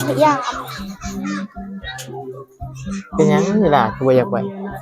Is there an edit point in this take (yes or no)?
no